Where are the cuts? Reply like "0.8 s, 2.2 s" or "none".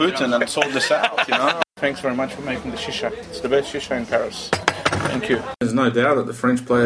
1.7 s, 5.6 s